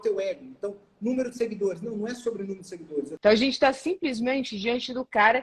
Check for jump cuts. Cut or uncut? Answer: cut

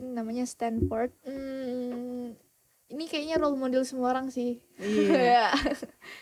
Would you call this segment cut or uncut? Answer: cut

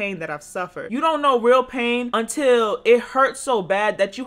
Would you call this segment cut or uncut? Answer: cut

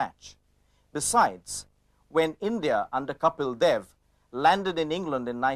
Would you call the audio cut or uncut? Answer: cut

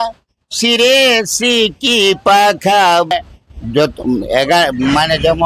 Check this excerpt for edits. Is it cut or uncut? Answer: cut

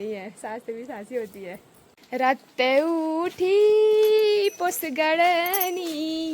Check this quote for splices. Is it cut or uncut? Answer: cut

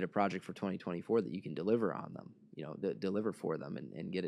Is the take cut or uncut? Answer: uncut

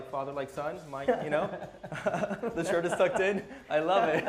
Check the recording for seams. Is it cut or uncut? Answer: uncut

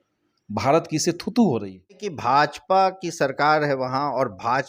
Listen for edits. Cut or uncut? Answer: cut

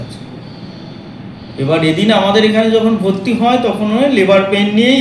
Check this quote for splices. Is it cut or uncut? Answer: uncut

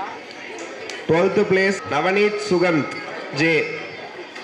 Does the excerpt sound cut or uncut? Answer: cut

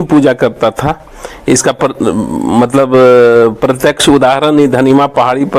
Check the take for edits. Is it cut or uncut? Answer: uncut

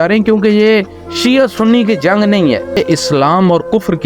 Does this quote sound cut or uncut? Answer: cut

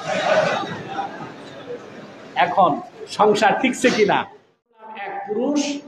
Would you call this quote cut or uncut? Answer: cut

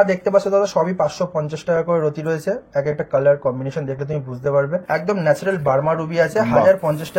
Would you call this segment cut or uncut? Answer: cut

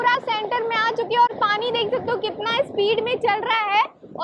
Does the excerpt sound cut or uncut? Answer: uncut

